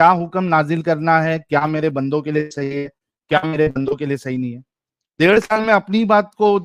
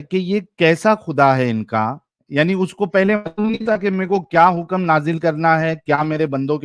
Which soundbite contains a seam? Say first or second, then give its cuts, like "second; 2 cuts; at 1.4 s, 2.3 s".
second; 1 cut; at 2.2 s